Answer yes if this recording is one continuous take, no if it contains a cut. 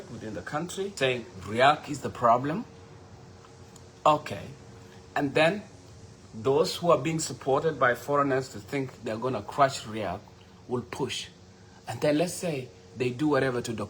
no